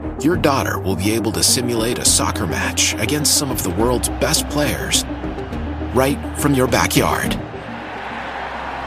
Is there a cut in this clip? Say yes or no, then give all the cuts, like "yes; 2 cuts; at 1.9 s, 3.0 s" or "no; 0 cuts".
no; 0 cuts